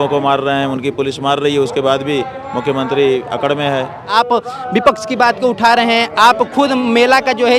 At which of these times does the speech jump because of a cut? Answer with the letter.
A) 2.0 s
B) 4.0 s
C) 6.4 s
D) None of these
B